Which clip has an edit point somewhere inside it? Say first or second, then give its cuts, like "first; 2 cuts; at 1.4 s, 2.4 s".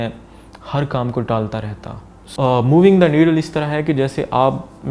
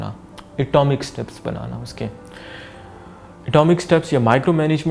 first; 1 cut; at 2.2 s